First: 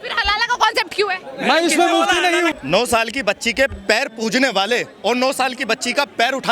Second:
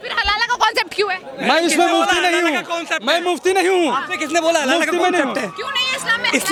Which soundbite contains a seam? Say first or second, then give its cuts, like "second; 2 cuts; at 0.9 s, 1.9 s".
first; 1 cut; at 2.6 s